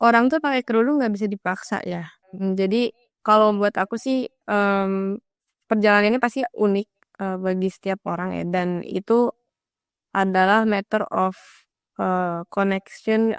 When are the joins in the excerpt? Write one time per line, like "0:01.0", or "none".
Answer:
0:02.1

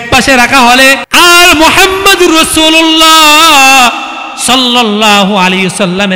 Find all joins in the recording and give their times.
0:01.0

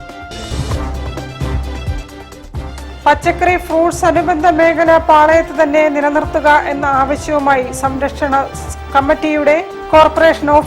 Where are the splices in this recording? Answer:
0:02.7

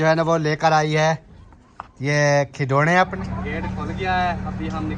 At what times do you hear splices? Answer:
0:03.2

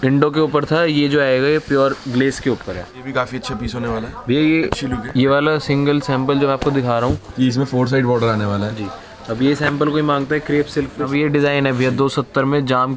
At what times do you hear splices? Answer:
0:02.9
0:07.2
0:11.1

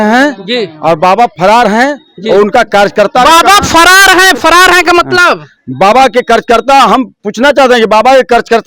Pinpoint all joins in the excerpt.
none

